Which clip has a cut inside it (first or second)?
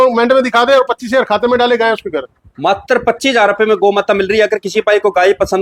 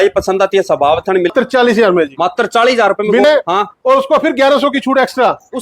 second